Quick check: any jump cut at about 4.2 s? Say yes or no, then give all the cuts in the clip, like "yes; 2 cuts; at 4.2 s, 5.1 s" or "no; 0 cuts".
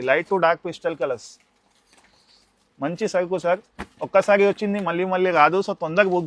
no; 0 cuts